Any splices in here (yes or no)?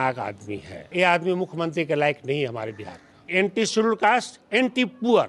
yes